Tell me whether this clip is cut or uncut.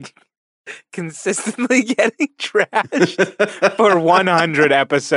uncut